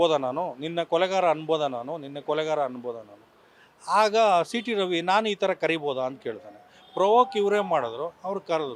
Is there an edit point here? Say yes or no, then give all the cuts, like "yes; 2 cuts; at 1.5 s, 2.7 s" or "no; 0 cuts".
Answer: no; 0 cuts